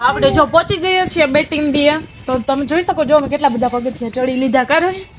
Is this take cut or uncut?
uncut